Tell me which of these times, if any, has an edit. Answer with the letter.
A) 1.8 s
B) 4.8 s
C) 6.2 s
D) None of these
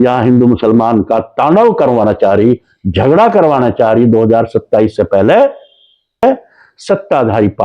C